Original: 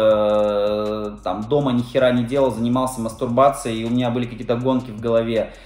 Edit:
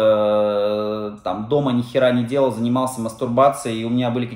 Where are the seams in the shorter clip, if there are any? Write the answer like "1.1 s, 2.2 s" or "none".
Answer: none